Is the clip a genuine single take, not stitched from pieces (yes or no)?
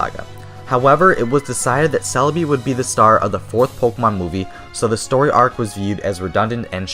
no